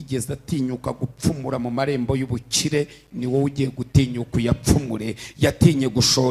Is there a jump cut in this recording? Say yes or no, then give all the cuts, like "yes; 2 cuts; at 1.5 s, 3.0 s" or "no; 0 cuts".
no; 0 cuts